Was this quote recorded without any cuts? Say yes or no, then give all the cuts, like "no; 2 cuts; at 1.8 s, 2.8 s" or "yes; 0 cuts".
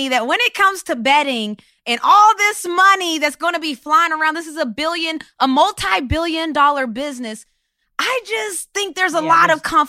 yes; 0 cuts